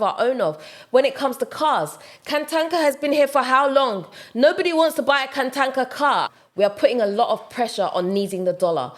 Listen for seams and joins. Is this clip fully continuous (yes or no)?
no